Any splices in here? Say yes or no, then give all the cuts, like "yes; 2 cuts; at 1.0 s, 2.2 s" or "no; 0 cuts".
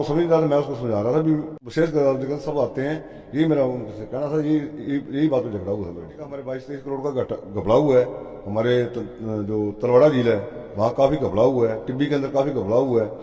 yes; 2 cuts; at 1.6 s, 6.5 s